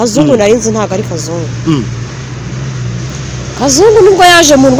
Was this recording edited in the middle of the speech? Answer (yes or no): no